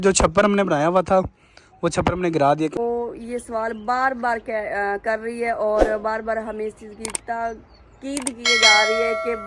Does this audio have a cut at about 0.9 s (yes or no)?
no